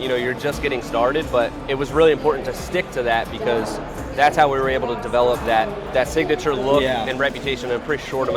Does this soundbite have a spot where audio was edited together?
yes; 2 cuts; at 1.6 s, 5.8 s

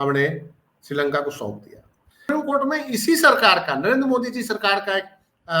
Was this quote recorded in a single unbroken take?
no; 1 cut; at 2.3 s

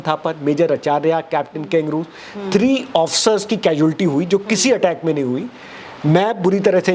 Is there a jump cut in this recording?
no; 0 cuts

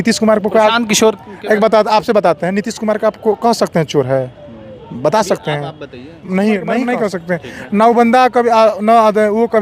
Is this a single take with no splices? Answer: no; 1 cut; at 6.9 s

